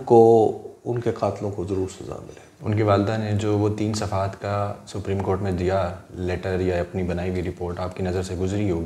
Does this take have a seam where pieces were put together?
no; 0 cuts

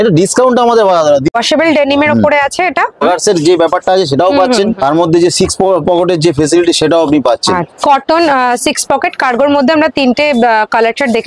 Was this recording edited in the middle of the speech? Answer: yes; 3 cuts; at 1.3 s, 3.0 s, 7.7 s

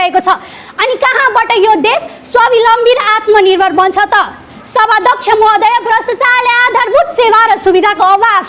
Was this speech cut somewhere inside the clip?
no; 0 cuts

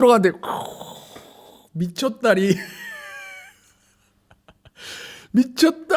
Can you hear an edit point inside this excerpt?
no; 0 cuts

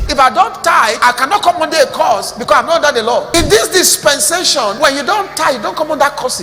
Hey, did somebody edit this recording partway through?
yes; 3 cuts; at 1.0 s, 3.3 s, 4.8 s

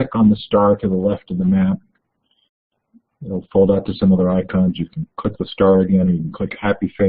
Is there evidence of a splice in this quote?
yes; 1 cut; at 1.3 s

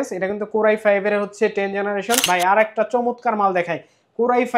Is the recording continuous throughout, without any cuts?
no; 1 cut; at 2.2 s

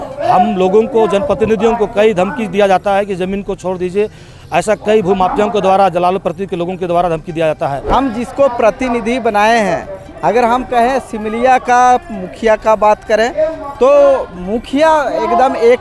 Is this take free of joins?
no; 1 cut; at 7.8 s

